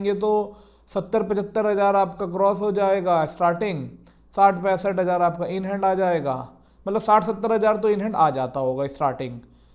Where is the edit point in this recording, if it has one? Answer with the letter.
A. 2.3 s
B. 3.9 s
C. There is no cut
C